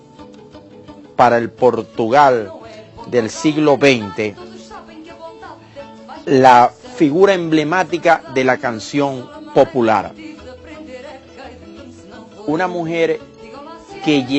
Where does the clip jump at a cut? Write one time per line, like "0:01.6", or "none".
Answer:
0:06.1